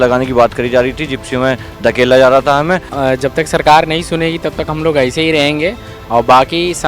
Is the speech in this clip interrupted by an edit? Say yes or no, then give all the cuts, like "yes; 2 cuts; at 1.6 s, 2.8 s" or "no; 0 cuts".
yes; 1 cut; at 2.9 s